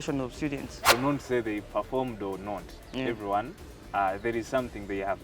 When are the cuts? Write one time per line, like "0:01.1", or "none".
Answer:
0:00.9